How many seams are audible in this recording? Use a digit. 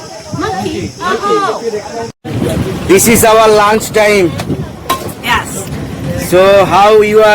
1